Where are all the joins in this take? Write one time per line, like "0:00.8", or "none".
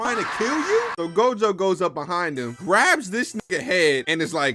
0:00.9